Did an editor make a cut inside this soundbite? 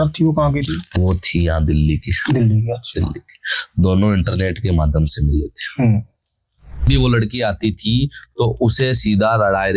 yes; 1 cut; at 6.8 s

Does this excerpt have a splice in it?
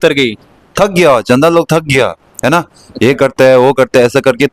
no; 0 cuts

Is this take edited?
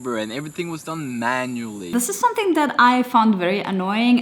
yes; 1 cut; at 1.9 s

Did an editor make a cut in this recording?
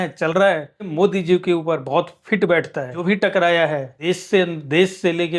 yes; 3 cuts; at 0.9 s, 3.0 s, 3.9 s

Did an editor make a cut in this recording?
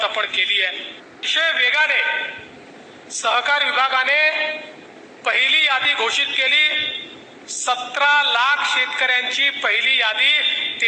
yes; 1 cut; at 1.2 s

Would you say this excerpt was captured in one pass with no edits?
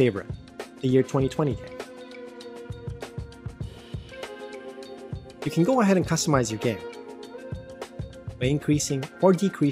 no; 2 cuts; at 1.6 s, 5.1 s

